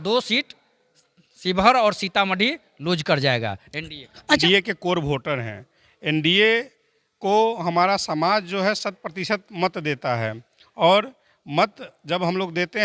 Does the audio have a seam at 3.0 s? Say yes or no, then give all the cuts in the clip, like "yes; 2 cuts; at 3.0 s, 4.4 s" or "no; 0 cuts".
no; 1 cut; at 4.4 s